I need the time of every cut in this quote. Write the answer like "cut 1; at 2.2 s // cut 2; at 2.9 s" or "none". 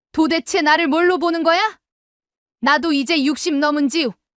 none